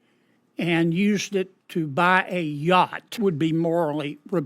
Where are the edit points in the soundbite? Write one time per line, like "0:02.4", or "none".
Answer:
0:03.2